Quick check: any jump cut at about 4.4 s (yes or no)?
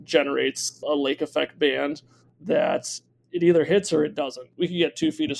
yes